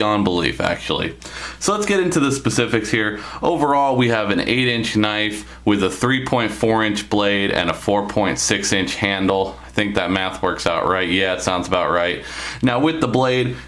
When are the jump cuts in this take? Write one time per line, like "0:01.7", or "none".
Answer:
0:03.3